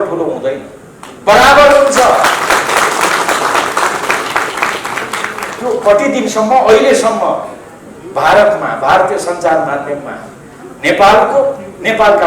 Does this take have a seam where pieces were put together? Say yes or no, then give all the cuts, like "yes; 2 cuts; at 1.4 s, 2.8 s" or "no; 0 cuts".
no; 0 cuts